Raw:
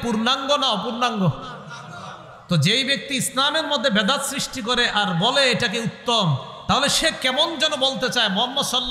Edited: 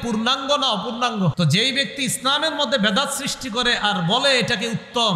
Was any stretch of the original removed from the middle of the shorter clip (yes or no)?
yes